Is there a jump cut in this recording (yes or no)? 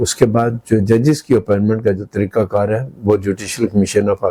no